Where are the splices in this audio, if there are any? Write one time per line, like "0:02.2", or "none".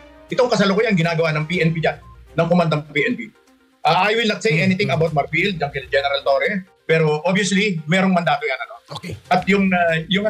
0:06.6